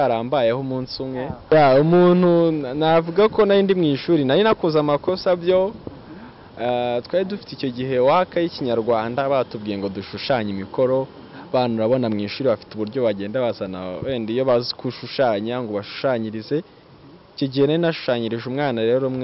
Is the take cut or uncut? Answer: cut